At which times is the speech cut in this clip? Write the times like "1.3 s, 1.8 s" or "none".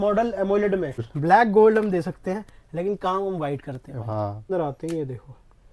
1.1 s, 4.5 s